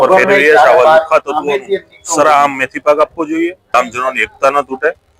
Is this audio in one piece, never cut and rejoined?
no; 1 cut; at 3.8 s

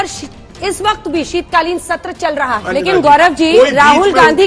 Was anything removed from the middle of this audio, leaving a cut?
yes; 1 cut; at 2.6 s

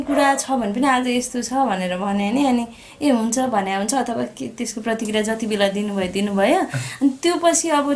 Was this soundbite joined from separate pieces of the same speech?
no; 0 cuts

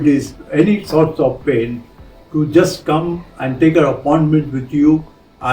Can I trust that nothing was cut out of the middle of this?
yes; 0 cuts

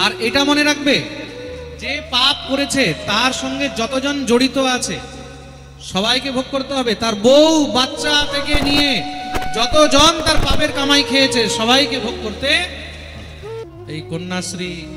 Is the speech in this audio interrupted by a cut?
yes; 1 cut; at 13.7 s

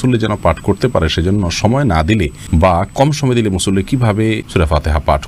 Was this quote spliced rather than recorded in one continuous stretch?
yes; 2 cuts; at 2.4 s, 4.4 s

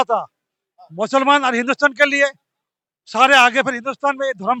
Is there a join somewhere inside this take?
no; 0 cuts

